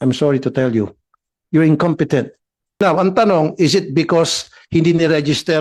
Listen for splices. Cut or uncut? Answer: cut